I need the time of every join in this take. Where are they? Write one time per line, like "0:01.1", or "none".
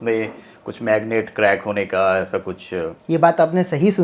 0:03.0